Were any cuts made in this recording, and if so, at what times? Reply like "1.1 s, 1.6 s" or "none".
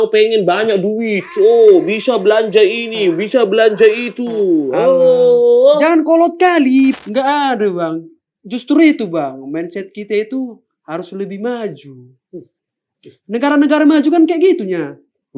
7.0 s